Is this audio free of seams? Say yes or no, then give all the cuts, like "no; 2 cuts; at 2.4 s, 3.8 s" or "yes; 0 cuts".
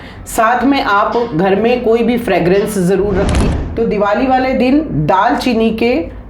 no; 1 cut; at 3.4 s